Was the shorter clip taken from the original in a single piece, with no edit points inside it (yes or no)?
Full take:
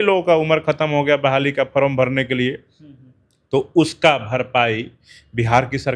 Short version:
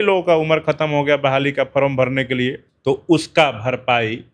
no